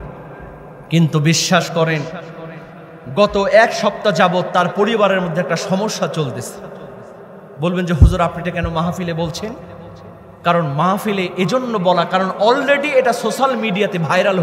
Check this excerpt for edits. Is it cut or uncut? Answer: uncut